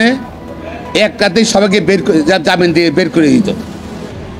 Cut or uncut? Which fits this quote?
uncut